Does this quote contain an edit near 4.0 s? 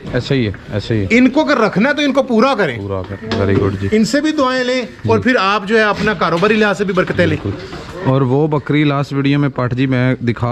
no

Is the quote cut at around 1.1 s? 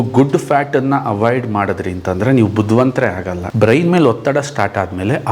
no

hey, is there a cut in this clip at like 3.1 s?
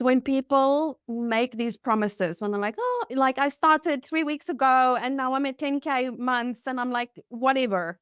yes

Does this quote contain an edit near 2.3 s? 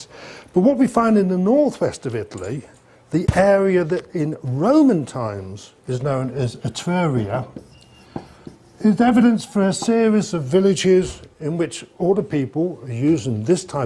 yes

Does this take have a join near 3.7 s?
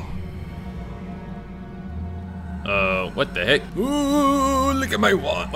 yes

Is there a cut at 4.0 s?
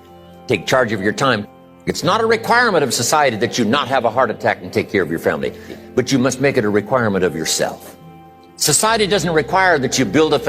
no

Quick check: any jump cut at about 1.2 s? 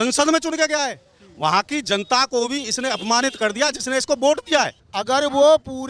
no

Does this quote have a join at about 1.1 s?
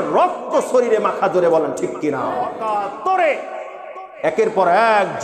no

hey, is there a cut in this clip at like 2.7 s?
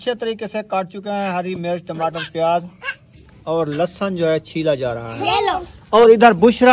no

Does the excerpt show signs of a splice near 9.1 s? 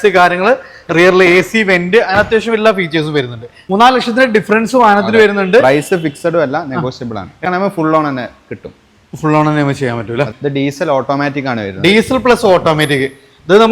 no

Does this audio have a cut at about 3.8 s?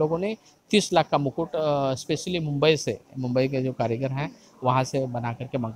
no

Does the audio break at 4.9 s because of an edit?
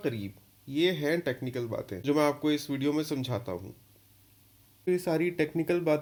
no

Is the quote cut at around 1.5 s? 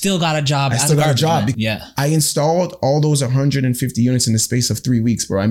yes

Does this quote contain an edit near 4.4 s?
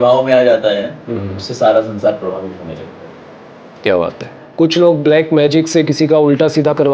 yes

